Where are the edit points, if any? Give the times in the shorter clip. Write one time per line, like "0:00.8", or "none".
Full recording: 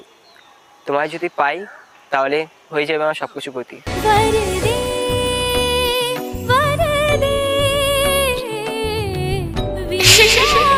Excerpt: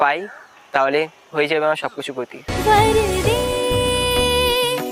none